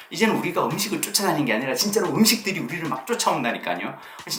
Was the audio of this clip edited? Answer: no; 0 cuts

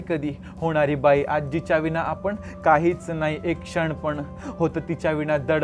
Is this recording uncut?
yes; 0 cuts

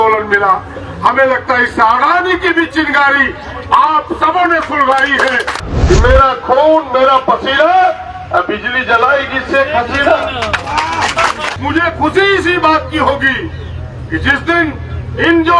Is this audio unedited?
no; 2 cuts; at 5.5 s, 11.4 s

